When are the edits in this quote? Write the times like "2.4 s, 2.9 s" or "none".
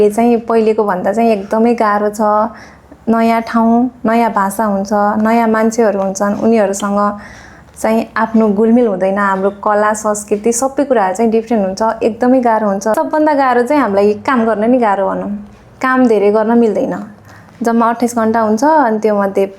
none